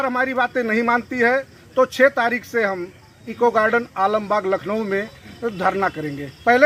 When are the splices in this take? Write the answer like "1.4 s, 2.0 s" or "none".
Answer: none

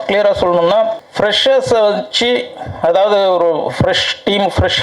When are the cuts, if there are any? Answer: 1.0 s

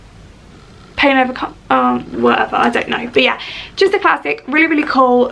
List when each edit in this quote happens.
none

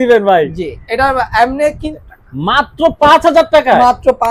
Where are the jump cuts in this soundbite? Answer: 1.9 s

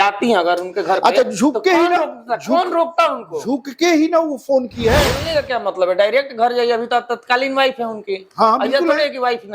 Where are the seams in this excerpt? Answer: 5.2 s

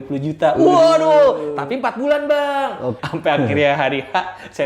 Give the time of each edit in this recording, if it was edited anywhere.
3.0 s

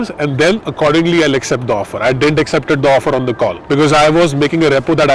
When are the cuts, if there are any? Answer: none

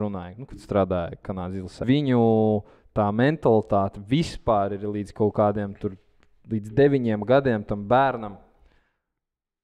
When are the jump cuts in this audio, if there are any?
1.8 s

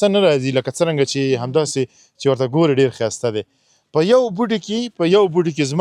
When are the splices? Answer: none

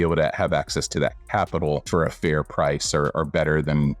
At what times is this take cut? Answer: 1.8 s

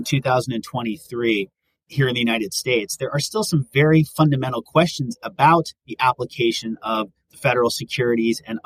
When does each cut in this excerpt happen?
none

